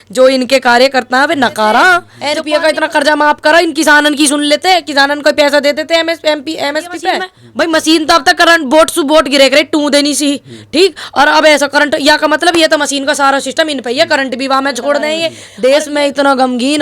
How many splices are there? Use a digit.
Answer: 3